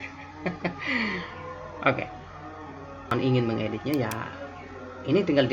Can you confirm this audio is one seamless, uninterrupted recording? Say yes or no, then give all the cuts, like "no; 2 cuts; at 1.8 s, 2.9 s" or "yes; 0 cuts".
no; 1 cut; at 3.1 s